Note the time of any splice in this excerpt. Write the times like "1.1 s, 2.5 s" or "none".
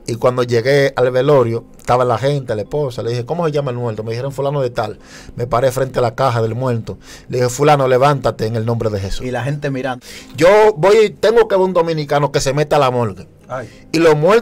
10.0 s